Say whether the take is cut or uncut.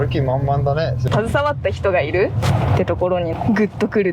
cut